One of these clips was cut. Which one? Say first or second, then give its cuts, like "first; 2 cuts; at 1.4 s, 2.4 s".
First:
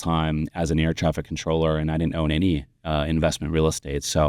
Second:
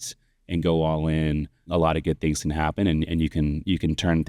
second; 1 cut; at 1.6 s